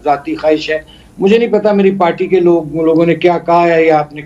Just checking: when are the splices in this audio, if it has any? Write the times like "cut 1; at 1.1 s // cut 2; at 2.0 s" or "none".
none